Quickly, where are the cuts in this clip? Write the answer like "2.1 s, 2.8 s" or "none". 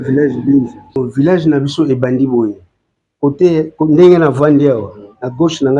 1.0 s